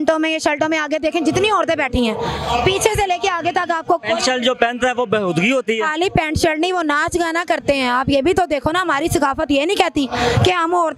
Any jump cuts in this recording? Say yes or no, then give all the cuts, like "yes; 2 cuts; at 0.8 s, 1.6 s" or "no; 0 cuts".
no; 0 cuts